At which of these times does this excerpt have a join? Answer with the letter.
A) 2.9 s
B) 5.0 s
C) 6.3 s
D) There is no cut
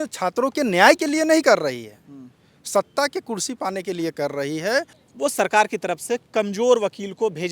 B